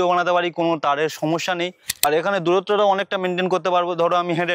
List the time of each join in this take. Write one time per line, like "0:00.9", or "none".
0:02.0